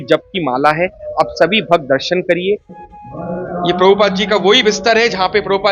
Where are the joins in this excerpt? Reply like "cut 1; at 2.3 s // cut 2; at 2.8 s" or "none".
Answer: cut 1; at 2.7 s